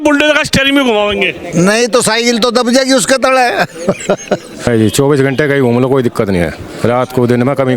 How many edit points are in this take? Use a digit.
1